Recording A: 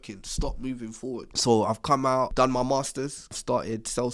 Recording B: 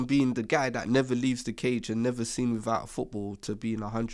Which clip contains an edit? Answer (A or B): A